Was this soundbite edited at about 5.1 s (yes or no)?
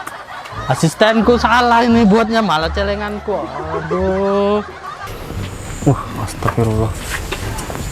yes